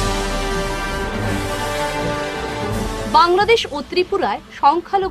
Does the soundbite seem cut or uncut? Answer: cut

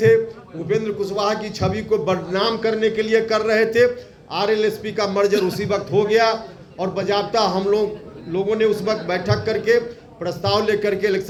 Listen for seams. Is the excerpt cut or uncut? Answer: uncut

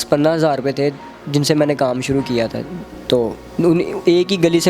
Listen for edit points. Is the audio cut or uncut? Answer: uncut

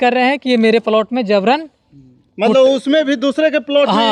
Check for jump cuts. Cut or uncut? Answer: uncut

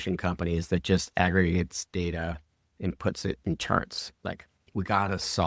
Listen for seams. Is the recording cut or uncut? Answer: uncut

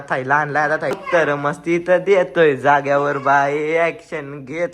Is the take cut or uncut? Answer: cut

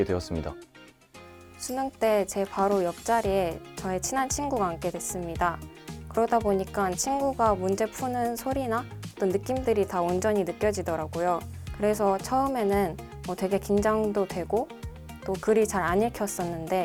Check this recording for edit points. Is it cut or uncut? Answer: uncut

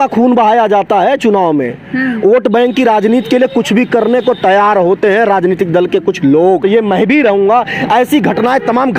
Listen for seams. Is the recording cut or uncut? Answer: cut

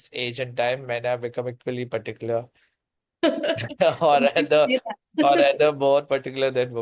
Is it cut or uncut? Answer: uncut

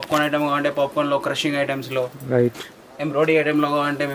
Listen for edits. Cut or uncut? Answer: uncut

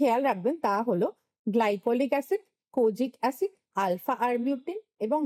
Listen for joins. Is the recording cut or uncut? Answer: uncut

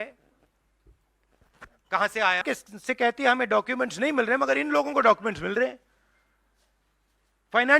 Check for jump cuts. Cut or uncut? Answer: cut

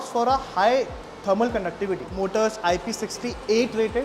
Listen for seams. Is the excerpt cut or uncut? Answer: cut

